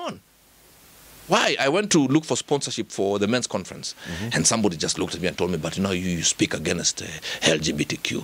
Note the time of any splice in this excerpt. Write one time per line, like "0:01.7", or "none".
none